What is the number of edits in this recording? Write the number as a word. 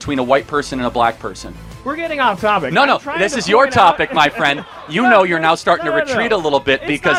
zero